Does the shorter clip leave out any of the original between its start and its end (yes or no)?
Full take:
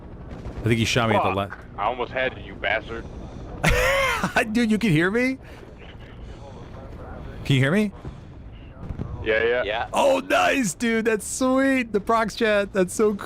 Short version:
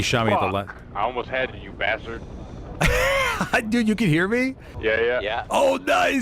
yes